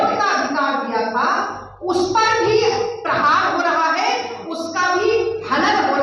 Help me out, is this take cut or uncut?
uncut